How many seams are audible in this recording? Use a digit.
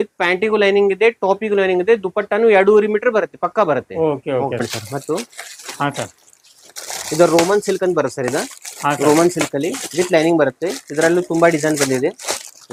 0